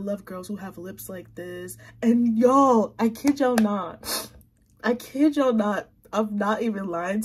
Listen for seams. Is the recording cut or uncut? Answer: uncut